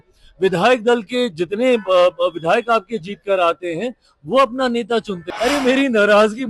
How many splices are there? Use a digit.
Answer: 1